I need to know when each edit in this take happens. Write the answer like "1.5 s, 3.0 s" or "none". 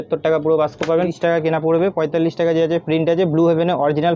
1.1 s